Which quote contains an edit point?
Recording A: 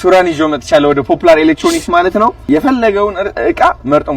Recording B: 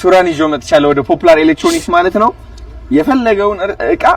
A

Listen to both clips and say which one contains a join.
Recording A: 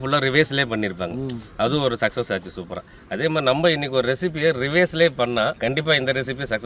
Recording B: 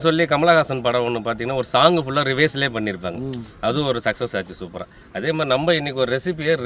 A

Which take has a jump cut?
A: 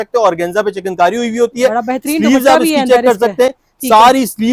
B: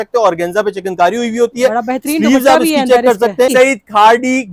B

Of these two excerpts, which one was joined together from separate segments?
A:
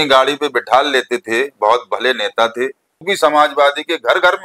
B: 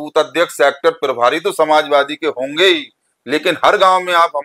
A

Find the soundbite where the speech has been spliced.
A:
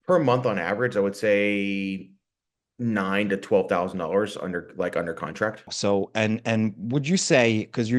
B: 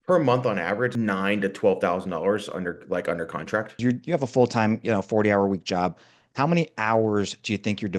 B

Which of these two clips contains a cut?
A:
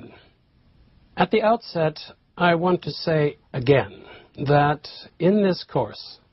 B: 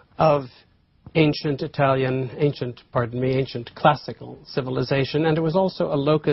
A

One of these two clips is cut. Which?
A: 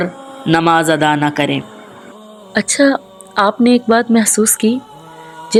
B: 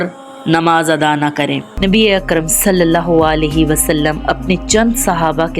B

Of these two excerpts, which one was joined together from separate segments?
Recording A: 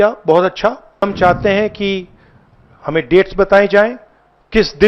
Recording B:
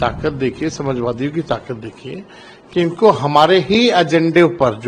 A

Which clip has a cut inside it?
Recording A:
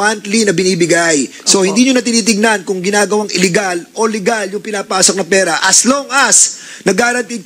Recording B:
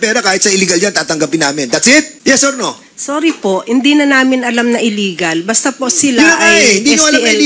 B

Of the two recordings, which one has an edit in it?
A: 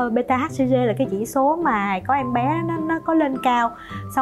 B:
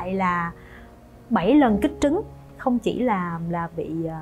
B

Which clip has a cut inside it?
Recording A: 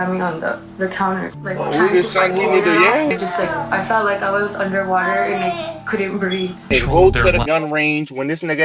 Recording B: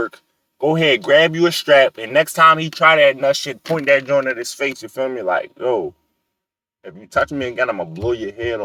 A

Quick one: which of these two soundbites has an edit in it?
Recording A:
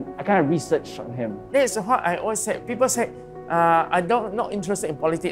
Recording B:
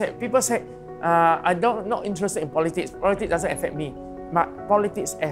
A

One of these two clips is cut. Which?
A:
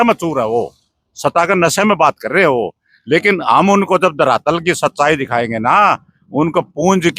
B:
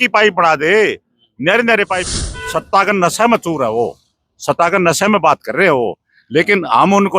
B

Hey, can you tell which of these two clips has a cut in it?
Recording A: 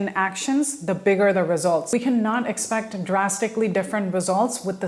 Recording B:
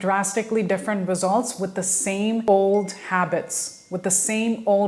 A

